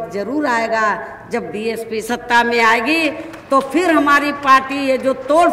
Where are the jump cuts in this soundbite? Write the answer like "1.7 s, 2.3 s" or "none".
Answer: 2.0 s